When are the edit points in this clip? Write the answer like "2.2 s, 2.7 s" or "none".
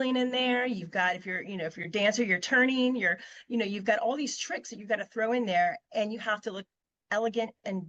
none

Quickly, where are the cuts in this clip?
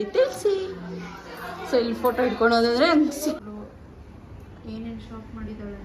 3.4 s

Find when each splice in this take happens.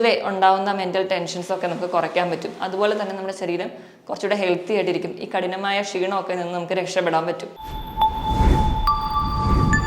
7.6 s

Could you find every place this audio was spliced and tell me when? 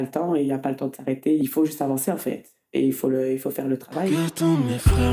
1.4 s, 4.1 s

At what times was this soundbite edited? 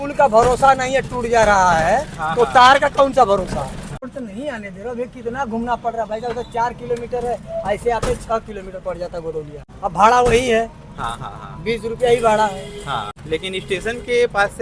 4.1 s, 9.6 s, 13.2 s

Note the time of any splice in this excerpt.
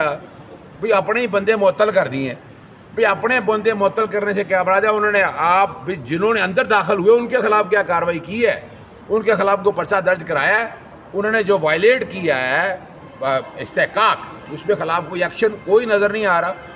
none

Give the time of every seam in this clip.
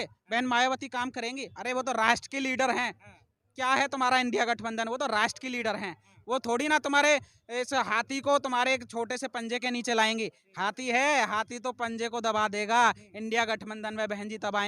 none

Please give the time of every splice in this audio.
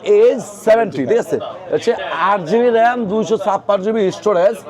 none

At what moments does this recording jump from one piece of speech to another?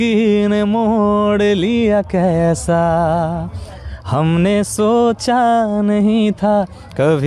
none

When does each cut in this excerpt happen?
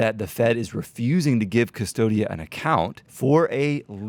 3.0 s

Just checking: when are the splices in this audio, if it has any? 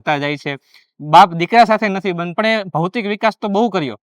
2.3 s

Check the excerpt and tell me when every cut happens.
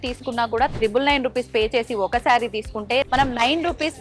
3.1 s

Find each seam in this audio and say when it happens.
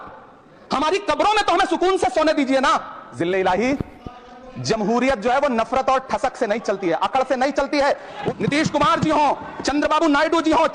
3.0 s, 8.2 s

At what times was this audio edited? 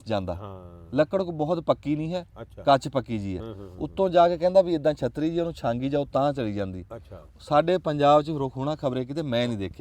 none

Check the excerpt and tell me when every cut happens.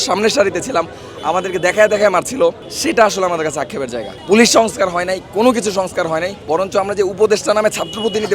2.7 s, 4.1 s, 6.3 s

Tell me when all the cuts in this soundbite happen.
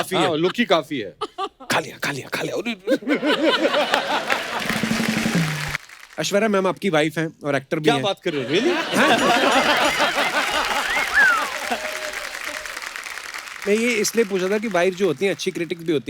5.7 s

